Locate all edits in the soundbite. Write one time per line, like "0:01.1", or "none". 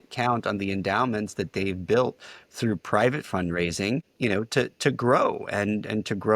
0:04.1